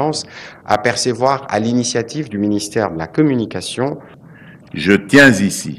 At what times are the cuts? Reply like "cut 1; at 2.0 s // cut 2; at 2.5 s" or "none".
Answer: cut 1; at 4.1 s